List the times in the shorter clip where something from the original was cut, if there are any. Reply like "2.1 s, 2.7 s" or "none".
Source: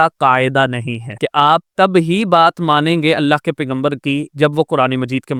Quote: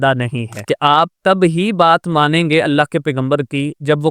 none